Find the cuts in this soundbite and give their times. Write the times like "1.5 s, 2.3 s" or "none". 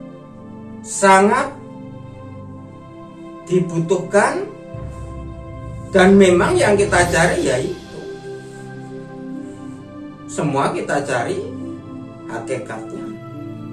1.0 s, 4.5 s, 5.9 s